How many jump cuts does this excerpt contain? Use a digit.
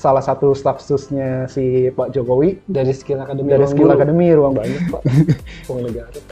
1